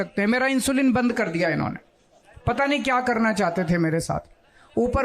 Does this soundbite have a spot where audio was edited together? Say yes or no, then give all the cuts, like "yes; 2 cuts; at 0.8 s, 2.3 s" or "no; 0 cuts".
no; 0 cuts